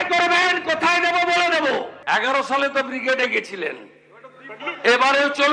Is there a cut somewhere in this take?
yes; 1 cut; at 1.9 s

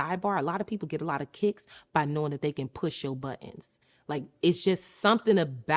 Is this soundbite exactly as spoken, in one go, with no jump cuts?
yes; 0 cuts

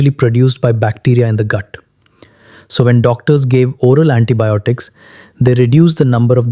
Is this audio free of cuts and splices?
yes; 0 cuts

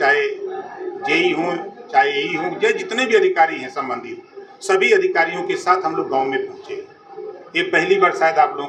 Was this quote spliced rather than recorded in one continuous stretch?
no; 0 cuts

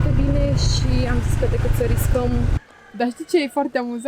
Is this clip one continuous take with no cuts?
no; 1 cut; at 2.7 s

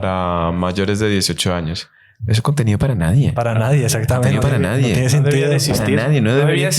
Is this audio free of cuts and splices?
yes; 0 cuts

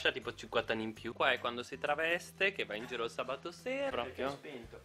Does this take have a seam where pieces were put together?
yes; 2 cuts; at 1.1 s, 3.9 s

